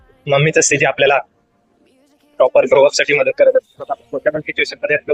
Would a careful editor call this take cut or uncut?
uncut